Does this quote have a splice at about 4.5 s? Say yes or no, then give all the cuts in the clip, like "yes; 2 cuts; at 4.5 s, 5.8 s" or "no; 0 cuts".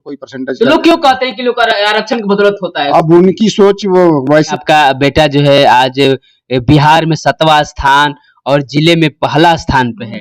yes; 1 cut; at 4.5 s